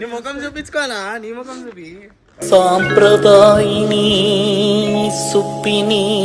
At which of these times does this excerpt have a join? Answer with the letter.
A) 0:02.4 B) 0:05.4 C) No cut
A